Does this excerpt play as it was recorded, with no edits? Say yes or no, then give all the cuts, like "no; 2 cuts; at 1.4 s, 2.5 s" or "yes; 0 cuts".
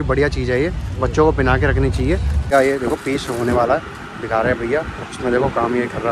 no; 1 cut; at 2.5 s